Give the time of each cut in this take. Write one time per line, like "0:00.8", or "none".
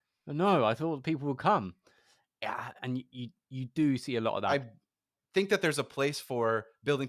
0:04.5